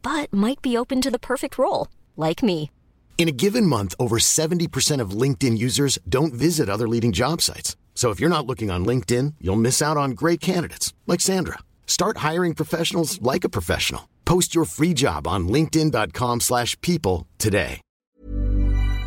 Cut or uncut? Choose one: cut